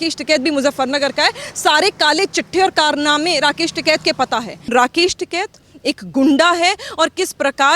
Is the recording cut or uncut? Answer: cut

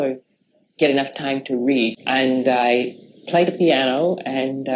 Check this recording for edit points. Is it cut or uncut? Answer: cut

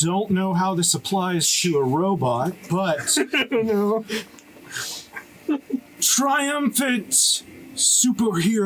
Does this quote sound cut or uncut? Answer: uncut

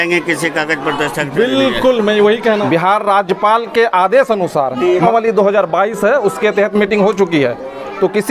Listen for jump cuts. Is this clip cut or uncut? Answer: cut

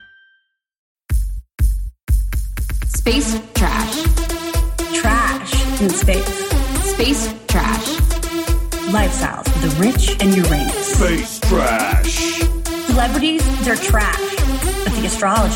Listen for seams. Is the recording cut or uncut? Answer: cut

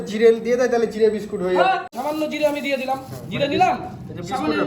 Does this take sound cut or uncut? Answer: cut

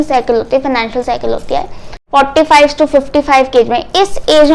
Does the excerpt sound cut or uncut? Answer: cut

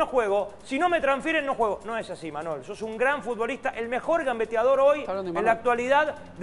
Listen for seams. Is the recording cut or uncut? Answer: uncut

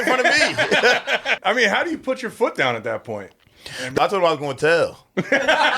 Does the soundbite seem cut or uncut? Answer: cut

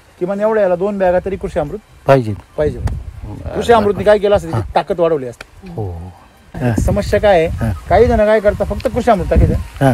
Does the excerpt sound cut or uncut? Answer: cut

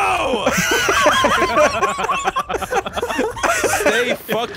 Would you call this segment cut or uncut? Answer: uncut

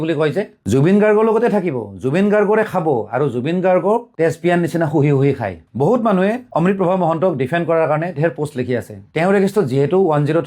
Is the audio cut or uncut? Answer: cut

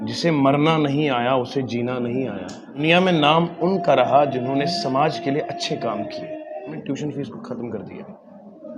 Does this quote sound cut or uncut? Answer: cut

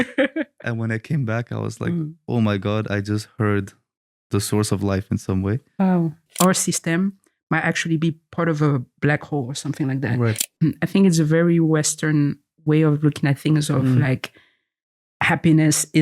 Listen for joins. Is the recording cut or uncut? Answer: cut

